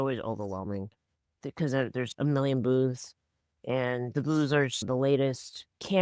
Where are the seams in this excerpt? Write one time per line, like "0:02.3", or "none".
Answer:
0:02.1